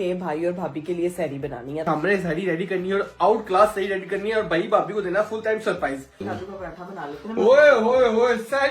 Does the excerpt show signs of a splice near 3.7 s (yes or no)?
no